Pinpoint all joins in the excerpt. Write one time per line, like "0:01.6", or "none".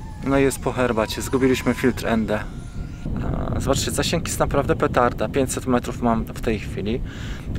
0:03.1

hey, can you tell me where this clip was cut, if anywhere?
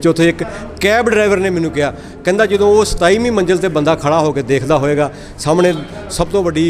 none

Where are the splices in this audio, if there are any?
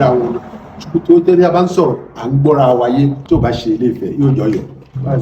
0:03.2

